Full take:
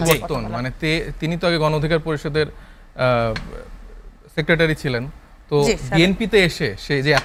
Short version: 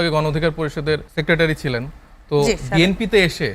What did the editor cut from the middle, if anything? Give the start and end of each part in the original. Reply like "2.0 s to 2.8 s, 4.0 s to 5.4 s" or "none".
2.6 s to 4.3 s